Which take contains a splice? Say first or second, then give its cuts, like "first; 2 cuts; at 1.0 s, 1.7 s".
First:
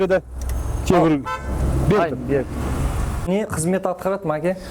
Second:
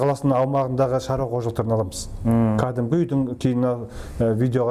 first; 1 cut; at 3.2 s